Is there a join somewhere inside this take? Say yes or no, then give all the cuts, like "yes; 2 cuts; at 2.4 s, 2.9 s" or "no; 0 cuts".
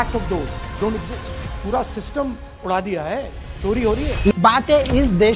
yes; 1 cut; at 4.3 s